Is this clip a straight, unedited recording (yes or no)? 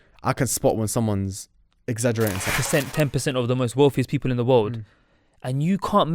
no